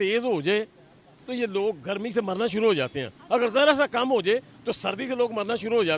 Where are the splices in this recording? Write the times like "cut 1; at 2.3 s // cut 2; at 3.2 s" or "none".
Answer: none